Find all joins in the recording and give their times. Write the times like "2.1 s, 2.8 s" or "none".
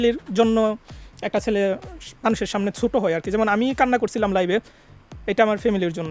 none